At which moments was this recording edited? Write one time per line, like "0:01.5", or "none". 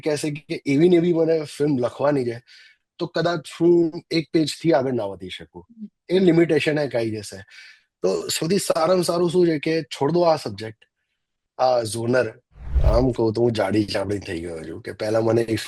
0:12.7